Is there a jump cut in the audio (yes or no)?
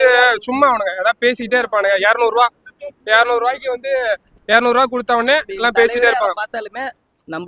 no